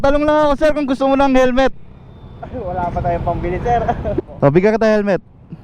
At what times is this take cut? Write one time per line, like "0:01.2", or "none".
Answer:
0:04.2